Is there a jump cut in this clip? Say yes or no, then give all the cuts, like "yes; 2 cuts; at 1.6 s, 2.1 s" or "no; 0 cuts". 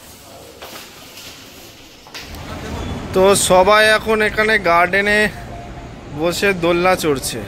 yes; 1 cut; at 2.4 s